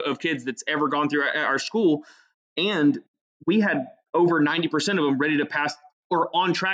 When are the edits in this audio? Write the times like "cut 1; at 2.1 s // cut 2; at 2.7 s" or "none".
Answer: none